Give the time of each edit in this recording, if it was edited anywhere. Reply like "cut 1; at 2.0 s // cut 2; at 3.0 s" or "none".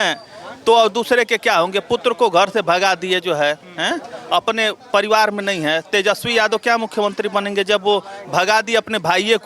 none